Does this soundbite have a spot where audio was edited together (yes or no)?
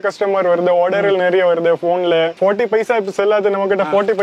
yes